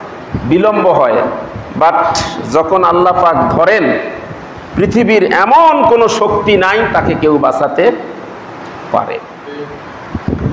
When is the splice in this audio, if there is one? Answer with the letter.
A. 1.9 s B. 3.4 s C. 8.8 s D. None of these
D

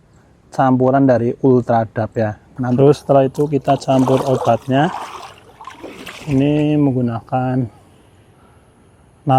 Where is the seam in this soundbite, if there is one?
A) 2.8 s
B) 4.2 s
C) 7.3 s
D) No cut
A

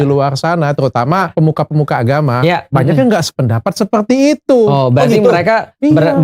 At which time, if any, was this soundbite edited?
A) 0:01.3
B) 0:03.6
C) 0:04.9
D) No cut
A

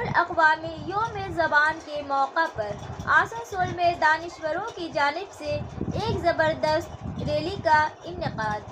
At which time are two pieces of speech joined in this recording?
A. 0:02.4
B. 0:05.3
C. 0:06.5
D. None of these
D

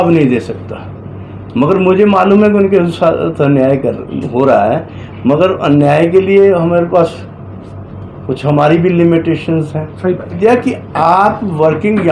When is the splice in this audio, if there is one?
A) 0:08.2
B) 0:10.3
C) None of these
B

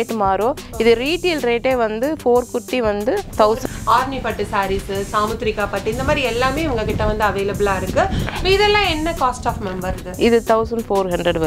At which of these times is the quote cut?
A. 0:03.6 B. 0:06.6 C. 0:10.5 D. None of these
A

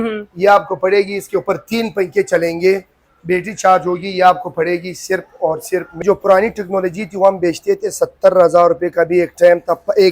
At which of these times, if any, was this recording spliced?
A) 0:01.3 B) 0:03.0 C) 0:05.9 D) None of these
C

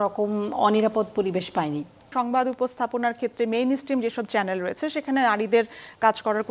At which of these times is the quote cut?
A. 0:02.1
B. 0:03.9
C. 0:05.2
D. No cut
A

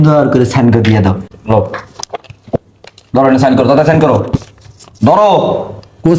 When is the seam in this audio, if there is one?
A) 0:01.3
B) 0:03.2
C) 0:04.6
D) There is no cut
A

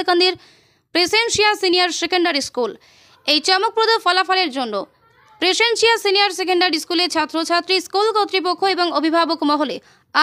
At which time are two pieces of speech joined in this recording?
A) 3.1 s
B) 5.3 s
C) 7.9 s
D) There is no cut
D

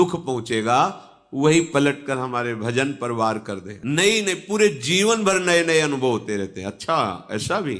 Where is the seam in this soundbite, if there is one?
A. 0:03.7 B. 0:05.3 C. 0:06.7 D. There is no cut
A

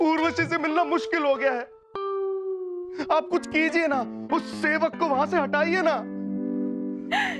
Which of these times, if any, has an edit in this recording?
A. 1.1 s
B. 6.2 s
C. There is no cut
C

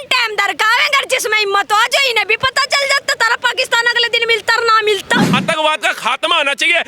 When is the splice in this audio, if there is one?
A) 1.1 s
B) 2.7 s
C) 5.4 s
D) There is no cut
C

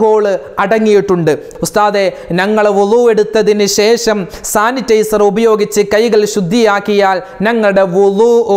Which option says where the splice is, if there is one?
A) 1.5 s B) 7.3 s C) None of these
A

